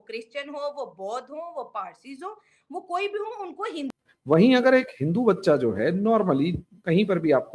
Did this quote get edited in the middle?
yes; 1 cut; at 3.9 s

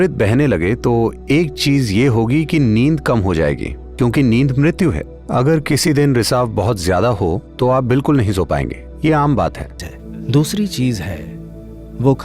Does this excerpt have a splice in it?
yes; 1 cut; at 9.8 s

